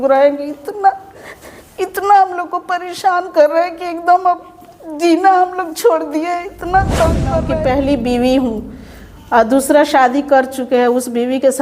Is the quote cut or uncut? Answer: cut